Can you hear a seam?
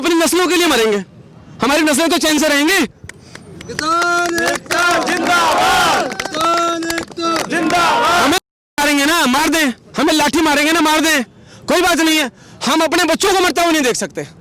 no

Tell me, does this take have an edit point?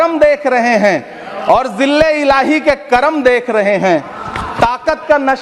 no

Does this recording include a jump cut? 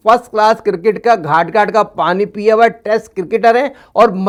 no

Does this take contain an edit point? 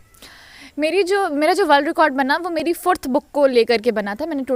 no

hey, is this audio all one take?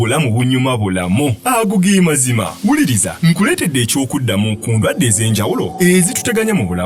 yes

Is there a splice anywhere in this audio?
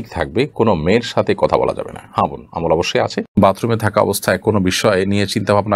yes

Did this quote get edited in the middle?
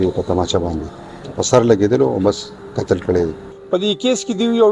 yes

